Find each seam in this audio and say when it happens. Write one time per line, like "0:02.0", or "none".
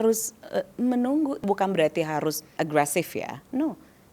0:01.4
0:02.5